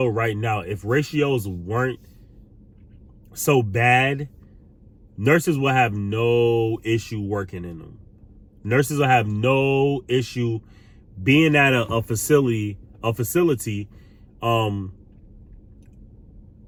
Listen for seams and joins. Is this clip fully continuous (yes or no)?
yes